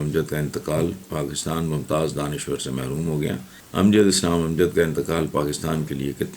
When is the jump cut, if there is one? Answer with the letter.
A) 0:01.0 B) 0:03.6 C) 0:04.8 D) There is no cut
B